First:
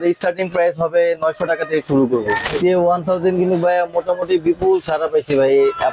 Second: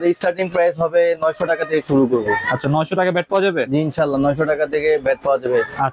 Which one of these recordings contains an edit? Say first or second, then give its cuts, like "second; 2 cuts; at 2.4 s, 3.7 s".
first; 1 cut; at 2.4 s